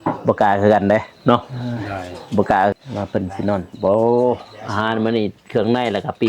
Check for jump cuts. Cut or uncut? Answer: cut